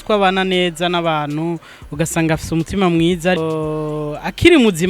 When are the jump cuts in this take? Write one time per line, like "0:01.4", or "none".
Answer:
0:03.4